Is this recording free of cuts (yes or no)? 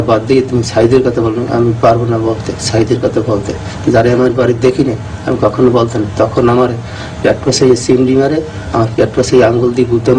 yes